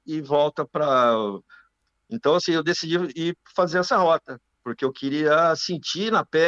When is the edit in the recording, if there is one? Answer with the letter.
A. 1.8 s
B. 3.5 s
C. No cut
A